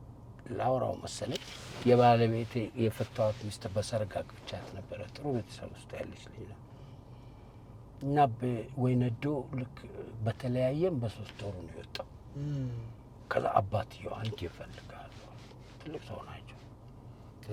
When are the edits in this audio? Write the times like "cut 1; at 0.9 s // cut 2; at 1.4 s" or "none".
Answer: none